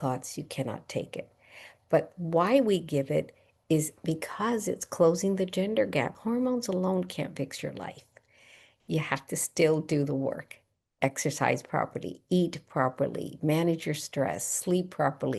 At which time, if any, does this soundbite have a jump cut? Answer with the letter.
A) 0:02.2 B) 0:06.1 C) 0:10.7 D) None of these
B